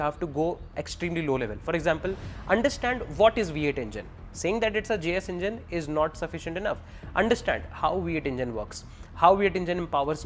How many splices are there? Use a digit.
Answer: 0